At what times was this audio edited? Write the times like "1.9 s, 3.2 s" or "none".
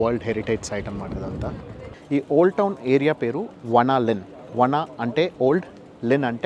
1.9 s